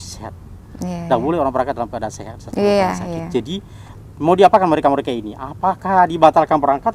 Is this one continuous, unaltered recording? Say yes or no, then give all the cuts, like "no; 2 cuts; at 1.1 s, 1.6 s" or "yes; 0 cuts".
yes; 0 cuts